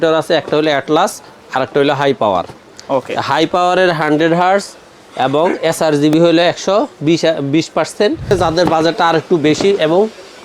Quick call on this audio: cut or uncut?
cut